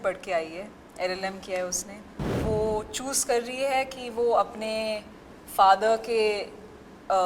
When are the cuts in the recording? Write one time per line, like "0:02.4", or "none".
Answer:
0:02.3